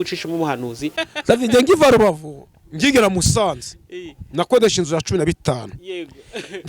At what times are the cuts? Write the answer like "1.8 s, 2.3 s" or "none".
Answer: 1.0 s